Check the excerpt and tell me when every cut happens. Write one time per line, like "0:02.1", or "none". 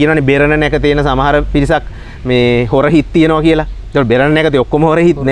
none